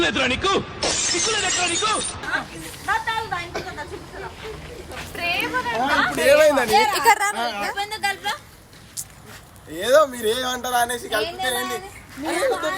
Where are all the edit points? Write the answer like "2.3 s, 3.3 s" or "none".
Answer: none